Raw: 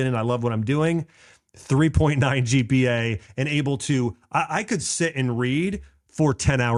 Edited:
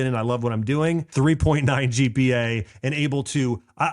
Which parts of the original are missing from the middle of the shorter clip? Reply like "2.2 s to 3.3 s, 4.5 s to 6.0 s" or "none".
1.1 s to 1.6 s